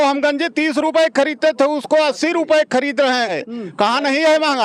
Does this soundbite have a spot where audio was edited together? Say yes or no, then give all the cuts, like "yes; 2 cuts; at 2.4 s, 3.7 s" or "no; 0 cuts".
yes; 1 cut; at 3.4 s